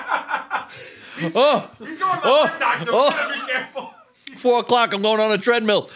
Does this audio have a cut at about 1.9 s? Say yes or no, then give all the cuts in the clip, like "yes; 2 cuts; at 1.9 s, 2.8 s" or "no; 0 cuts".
no; 0 cuts